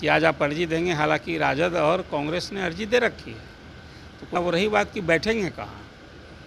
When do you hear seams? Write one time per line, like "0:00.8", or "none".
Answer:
0:04.3